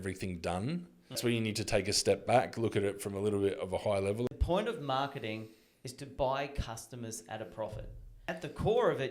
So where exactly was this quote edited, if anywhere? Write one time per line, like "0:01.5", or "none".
0:01.2
0:04.3
0:08.3